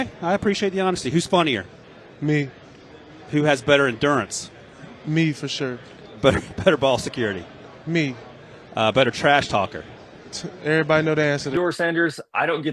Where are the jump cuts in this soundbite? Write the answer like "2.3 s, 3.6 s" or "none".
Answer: 11.5 s